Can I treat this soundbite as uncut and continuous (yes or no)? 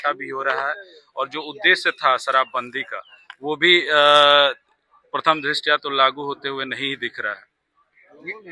yes